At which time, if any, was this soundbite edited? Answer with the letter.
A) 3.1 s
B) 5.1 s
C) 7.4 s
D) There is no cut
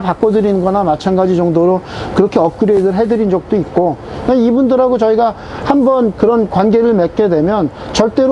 D